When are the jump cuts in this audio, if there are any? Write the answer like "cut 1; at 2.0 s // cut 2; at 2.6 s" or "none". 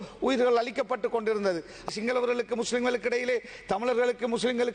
cut 1; at 1.9 s